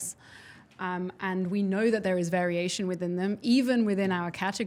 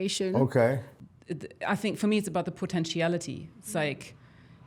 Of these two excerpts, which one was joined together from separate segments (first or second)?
second